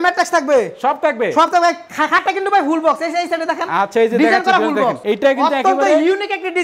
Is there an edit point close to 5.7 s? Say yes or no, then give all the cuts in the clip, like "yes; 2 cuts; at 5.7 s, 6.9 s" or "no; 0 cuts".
no; 0 cuts